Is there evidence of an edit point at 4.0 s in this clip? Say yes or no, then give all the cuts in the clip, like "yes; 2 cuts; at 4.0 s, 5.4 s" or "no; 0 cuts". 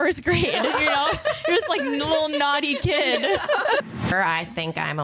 yes; 1 cut; at 4.0 s